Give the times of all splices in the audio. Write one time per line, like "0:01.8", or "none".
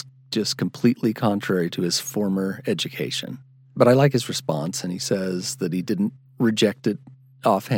none